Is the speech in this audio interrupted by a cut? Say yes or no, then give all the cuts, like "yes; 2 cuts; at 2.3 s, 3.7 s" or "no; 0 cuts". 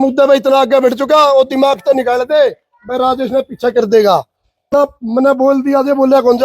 yes; 1 cut; at 4.7 s